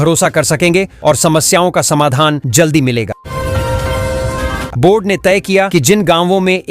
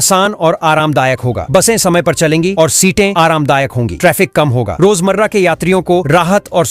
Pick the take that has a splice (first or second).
first